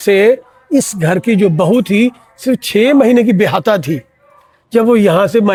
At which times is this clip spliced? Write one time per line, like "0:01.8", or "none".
none